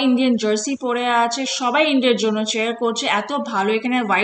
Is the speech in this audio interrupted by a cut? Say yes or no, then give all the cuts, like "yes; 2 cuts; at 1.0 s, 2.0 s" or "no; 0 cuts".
no; 0 cuts